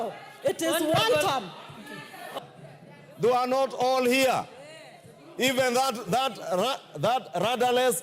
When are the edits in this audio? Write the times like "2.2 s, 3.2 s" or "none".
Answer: 2.4 s